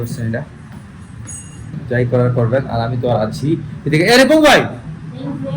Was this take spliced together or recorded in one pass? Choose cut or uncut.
cut